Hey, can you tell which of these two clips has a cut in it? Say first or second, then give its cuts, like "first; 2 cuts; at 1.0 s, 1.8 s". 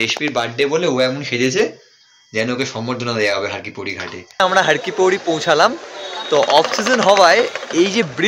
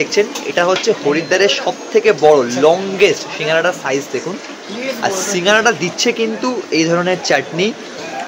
first; 1 cut; at 4.4 s